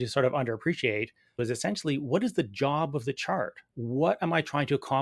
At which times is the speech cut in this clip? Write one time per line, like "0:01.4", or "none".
0:01.4
0:03.7